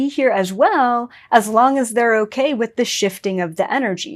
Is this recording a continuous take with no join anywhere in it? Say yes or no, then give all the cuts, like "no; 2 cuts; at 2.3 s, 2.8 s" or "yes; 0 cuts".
yes; 0 cuts